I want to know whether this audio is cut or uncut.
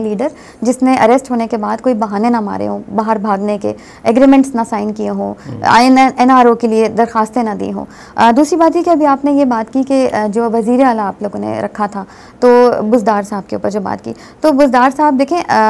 uncut